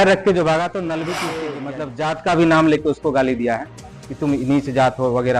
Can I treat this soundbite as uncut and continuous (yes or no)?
no